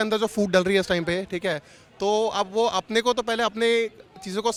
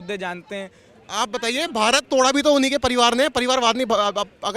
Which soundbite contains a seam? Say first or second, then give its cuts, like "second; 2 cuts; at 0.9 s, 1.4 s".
second; 1 cut; at 1.0 s